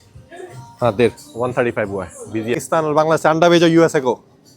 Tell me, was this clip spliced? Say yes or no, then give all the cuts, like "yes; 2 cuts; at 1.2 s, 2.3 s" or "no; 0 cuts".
yes; 1 cut; at 2.6 s